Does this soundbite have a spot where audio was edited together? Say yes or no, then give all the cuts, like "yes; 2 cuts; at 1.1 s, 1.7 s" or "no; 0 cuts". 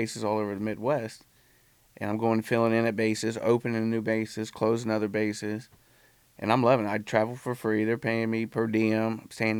no; 0 cuts